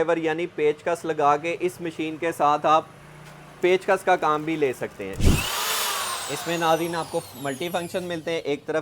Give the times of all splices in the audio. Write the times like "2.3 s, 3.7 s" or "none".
5.2 s